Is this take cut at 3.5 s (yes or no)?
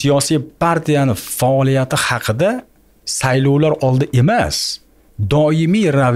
no